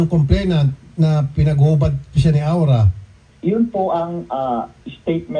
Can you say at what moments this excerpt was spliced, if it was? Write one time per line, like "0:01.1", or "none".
0:03.2